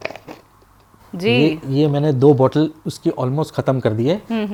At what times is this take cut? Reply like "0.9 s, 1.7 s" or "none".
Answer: none